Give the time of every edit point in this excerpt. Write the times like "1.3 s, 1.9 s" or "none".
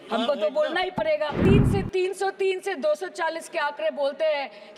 1.4 s